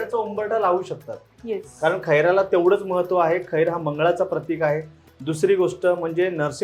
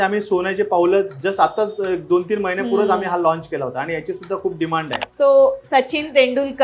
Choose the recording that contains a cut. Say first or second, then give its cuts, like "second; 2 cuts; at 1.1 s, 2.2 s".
second; 1 cut; at 5.0 s